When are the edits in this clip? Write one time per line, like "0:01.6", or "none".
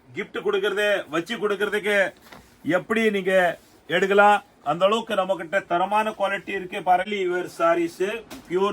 0:07.1